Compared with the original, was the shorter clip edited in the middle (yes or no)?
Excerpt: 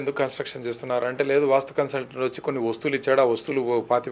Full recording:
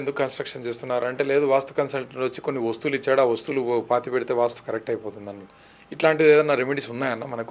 no